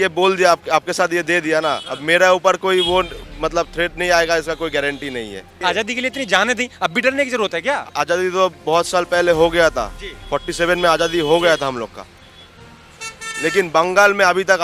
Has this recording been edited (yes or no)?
yes